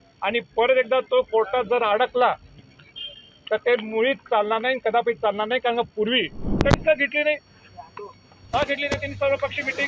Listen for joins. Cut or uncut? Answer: cut